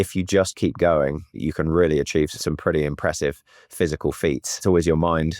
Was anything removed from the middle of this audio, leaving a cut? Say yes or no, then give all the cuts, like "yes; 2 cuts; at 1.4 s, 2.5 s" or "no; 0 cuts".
yes; 3 cuts; at 1.4 s, 2.4 s, 4.6 s